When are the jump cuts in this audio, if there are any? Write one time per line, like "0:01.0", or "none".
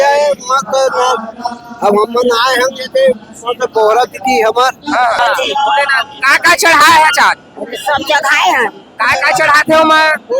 0:05.2